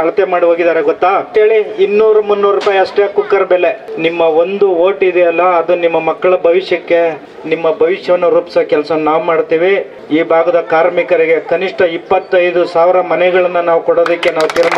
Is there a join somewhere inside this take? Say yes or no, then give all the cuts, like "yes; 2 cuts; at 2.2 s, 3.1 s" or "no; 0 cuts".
yes; 4 cuts; at 1.3 s, 3.9 s, 7.3 s, 9.9 s